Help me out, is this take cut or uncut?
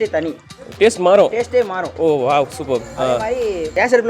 uncut